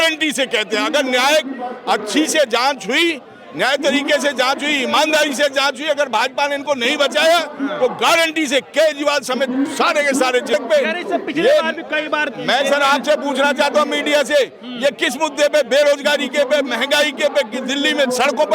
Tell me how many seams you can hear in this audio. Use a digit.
1